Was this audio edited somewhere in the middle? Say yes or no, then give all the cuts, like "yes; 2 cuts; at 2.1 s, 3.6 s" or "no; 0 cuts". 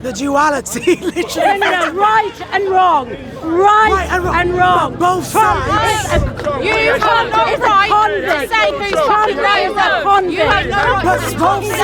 no; 0 cuts